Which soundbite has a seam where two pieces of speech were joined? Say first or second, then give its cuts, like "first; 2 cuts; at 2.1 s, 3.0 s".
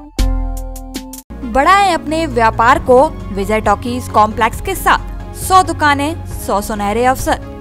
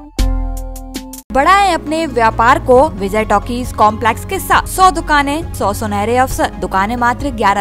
second; 5 cuts; at 1.3 s, 3.0 s, 4.7 s, 5.5 s, 6.6 s